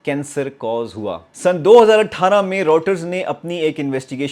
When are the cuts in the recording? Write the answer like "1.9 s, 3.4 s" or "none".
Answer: 1.3 s